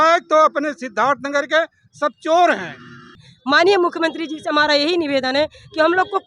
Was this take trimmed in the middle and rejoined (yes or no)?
yes